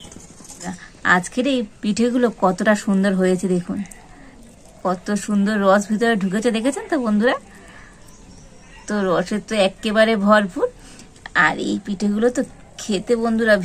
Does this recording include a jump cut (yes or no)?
yes